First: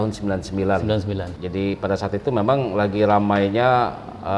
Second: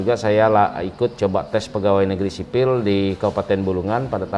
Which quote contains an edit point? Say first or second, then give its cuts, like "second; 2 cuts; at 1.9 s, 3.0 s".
first; 1 cut; at 1.3 s